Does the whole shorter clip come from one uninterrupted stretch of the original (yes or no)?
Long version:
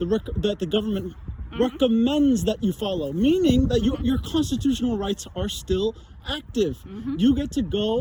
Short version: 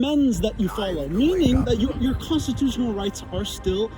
yes